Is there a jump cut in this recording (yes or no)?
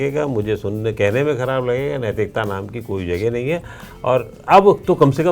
no